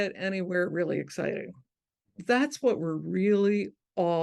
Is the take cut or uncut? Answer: cut